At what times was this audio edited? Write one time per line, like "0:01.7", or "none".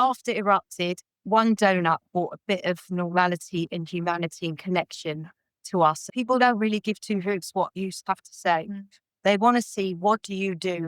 0:01.2
0:06.0

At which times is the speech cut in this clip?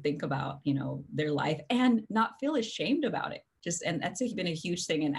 none

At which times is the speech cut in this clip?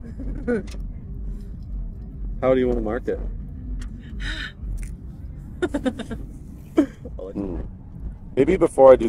0:07.0

